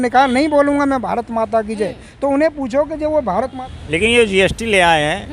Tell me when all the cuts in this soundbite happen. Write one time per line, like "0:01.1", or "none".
0:03.5